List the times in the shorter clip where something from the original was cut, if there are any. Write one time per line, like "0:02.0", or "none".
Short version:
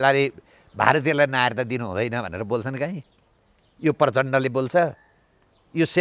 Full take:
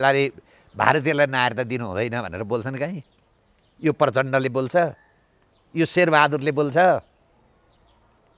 none